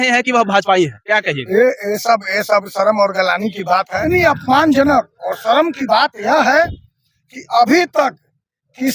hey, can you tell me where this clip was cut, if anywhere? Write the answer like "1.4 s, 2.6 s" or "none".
4.0 s